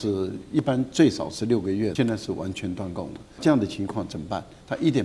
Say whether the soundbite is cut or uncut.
cut